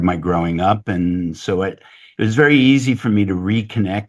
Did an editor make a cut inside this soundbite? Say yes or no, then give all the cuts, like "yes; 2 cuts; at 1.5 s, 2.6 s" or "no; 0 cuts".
no; 0 cuts